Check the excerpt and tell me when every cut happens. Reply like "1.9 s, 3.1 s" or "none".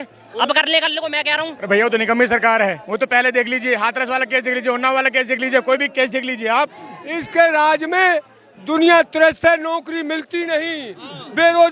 1.5 s, 6.8 s